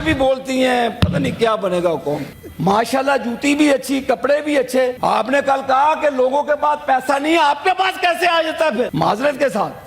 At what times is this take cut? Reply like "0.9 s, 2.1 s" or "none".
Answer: 2.4 s, 5.0 s, 8.9 s